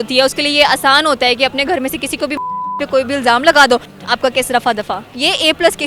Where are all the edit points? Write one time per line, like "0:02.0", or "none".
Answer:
none

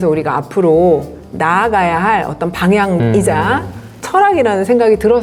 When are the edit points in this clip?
none

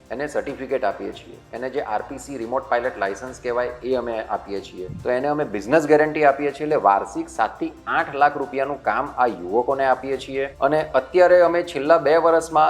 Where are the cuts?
0:04.8
0:10.4

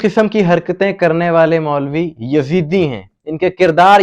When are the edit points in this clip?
none

